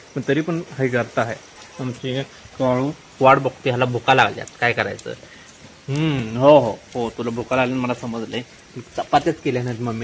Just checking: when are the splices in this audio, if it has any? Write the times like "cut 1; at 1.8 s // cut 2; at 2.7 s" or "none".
none

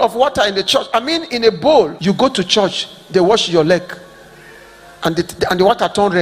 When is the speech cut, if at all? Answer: cut 1; at 2.0 s

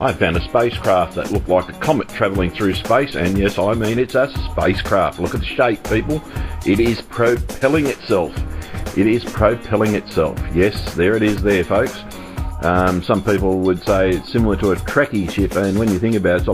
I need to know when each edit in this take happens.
cut 1; at 12.4 s

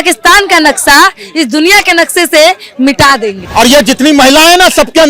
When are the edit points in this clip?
cut 1; at 3.4 s

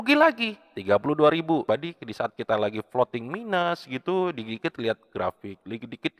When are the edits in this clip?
cut 1; at 1.6 s

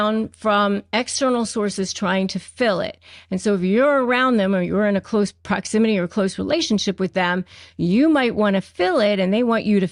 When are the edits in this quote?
none

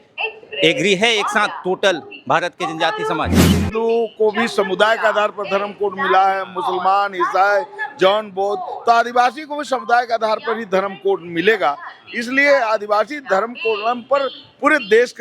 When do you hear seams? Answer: cut 1; at 3.6 s

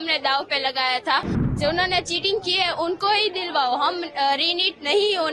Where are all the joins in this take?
cut 1; at 1.5 s

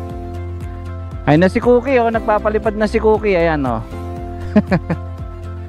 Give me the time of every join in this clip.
cut 1; at 1.2 s // cut 2; at 5.0 s

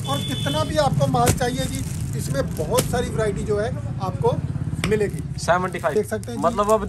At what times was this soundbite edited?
cut 1; at 5.9 s

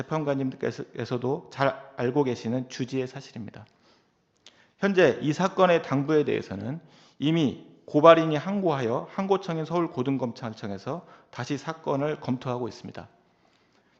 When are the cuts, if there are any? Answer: none

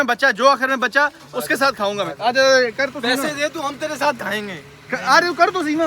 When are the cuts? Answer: none

